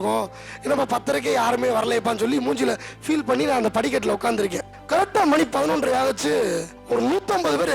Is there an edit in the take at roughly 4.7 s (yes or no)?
yes